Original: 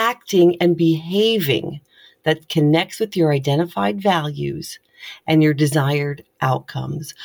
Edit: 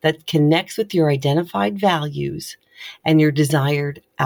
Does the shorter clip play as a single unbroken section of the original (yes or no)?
yes